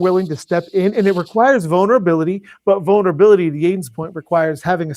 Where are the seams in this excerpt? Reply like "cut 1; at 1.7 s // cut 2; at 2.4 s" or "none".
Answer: none